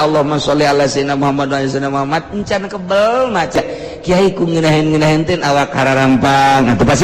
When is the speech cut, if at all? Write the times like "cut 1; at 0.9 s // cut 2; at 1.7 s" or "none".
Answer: cut 1; at 3.6 s